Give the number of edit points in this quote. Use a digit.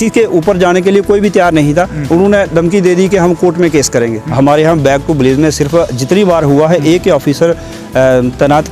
1